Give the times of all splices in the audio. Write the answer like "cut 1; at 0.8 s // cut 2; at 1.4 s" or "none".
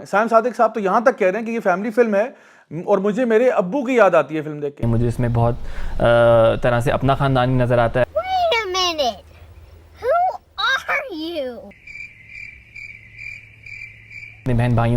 cut 1; at 4.8 s // cut 2; at 11.7 s

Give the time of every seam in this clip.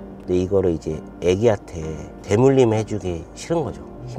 none

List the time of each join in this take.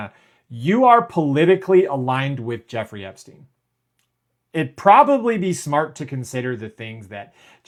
none

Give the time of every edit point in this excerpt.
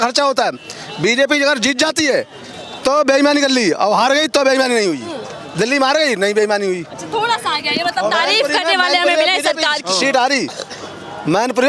none

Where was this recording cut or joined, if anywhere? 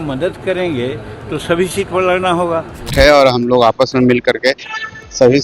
cut 1; at 2.9 s

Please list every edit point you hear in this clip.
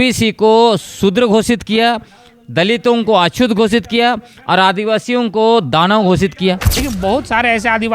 cut 1; at 6.7 s

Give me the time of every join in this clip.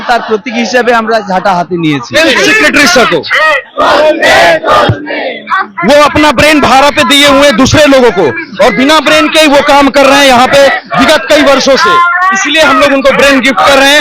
cut 1; at 2.1 s

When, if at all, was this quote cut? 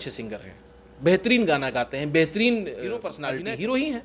cut 1; at 3.1 s

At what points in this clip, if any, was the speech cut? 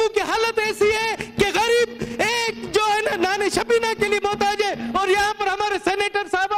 none

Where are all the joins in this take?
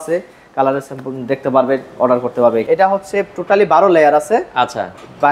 cut 1; at 2.6 s

